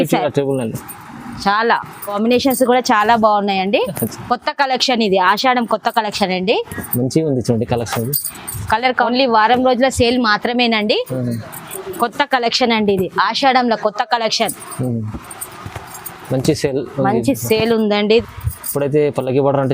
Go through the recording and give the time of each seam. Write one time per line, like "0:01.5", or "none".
0:02.1
0:09.1
0:18.2